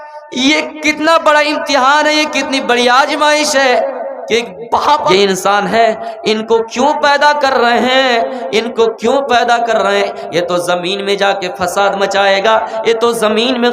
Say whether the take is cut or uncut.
cut